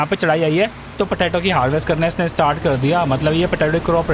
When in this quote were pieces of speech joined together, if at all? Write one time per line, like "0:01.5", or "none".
0:00.9